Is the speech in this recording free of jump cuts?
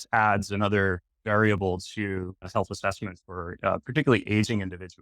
no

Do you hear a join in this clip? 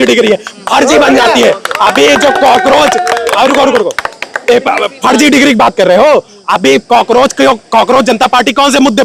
no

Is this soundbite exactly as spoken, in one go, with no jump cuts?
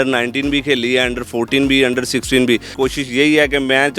no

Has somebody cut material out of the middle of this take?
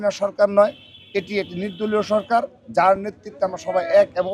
no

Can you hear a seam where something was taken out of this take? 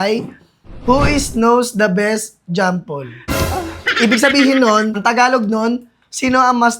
yes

